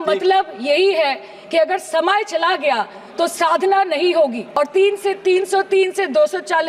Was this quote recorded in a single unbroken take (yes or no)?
no